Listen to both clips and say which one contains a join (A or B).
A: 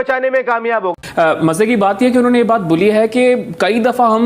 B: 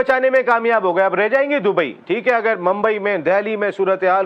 A